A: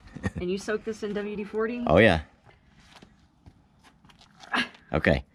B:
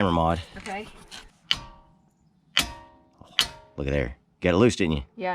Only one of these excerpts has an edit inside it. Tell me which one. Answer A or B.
B